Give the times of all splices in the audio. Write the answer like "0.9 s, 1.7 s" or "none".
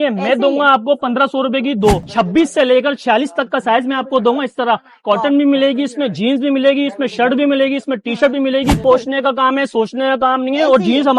2.1 s, 8.8 s